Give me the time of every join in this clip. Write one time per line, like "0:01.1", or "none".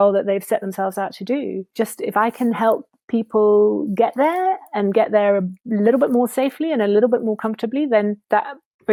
none